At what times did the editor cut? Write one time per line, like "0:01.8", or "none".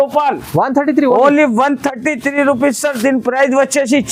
none